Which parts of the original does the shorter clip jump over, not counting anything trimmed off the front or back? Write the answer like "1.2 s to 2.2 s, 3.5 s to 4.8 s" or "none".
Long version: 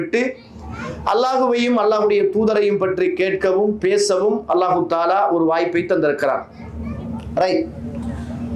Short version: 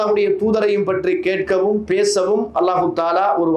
none